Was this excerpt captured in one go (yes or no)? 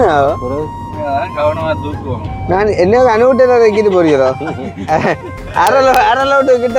yes